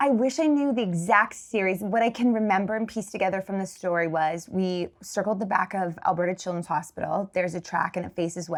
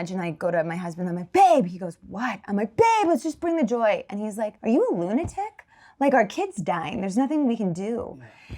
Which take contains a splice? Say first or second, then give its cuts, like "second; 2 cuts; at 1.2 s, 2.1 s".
second; 1 cut; at 4.5 s